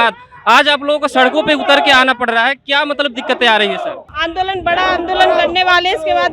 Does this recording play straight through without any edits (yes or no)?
no